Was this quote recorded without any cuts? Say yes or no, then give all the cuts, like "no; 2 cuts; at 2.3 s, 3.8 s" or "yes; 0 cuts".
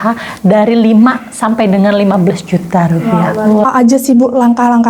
no; 1 cut; at 3.6 s